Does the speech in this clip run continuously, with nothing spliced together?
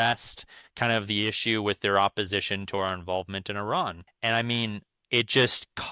no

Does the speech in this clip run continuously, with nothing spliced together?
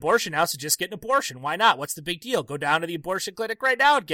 yes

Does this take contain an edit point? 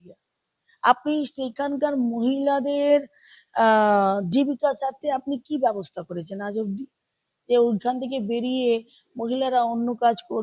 no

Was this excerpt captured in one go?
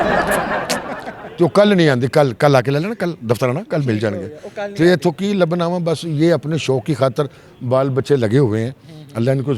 yes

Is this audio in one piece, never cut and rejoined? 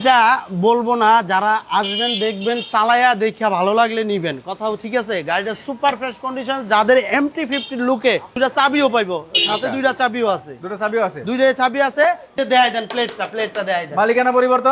no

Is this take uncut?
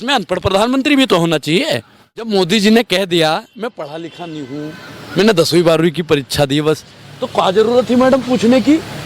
no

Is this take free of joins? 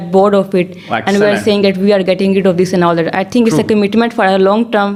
yes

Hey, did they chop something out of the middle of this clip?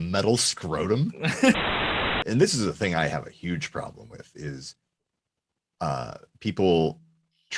yes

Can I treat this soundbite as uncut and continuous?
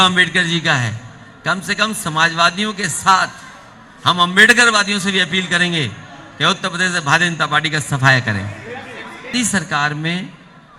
no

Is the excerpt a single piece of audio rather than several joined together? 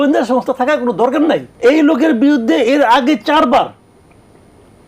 no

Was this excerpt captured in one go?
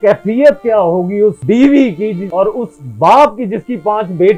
no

